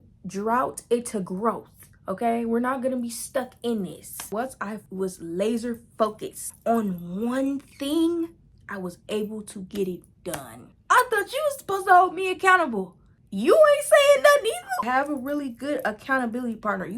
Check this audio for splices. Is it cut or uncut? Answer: cut